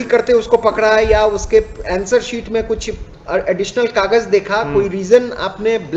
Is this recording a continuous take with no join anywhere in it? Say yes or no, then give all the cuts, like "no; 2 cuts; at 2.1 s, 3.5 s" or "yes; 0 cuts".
yes; 0 cuts